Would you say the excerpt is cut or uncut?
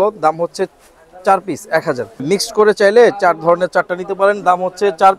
cut